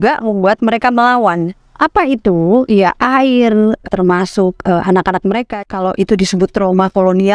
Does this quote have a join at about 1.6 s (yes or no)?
yes